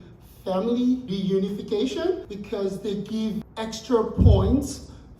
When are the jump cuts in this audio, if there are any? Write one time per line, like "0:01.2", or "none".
0:01.1
0:02.3
0:03.4